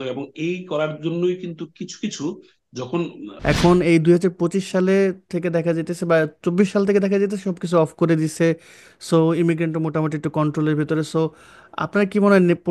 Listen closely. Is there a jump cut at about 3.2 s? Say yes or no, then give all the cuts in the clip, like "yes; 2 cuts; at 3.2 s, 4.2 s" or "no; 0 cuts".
yes; 1 cut; at 3.2 s